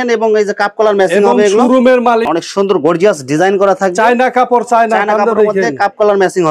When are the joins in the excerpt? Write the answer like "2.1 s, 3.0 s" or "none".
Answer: 2.3 s